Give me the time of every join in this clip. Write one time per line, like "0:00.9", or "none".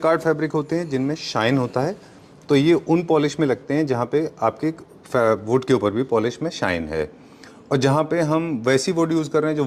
none